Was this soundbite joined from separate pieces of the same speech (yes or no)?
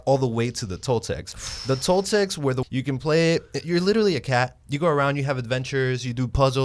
yes